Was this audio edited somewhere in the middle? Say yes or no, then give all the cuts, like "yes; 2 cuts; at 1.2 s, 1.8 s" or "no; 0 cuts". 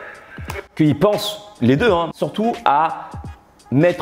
yes; 1 cut; at 2.1 s